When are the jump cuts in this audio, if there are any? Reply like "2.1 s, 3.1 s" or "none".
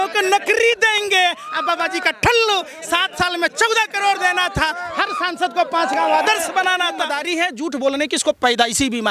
7.1 s